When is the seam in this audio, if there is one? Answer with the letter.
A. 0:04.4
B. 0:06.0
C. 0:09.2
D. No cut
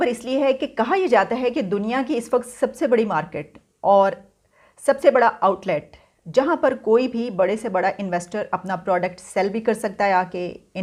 D